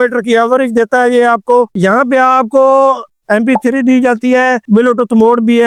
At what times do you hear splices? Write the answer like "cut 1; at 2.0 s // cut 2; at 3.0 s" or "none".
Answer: none